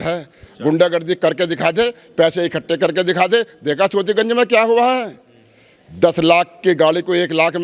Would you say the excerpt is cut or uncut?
uncut